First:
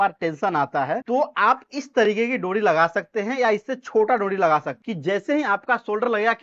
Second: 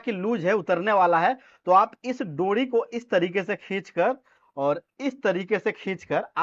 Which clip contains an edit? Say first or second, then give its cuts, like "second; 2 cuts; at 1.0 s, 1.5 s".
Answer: first; 2 cuts; at 1.0 s, 4.8 s